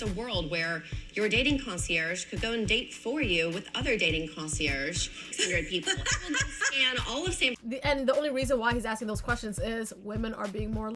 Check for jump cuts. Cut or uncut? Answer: cut